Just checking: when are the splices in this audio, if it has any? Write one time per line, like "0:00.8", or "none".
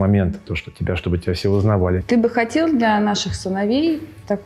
0:02.0